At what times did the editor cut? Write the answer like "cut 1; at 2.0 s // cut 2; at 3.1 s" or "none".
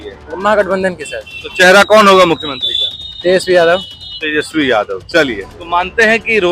cut 1; at 5.5 s